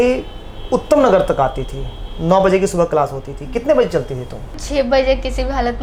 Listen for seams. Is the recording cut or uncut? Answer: uncut